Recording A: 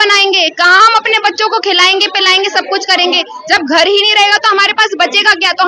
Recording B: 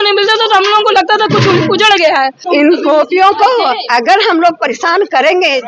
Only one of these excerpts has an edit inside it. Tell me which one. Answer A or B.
B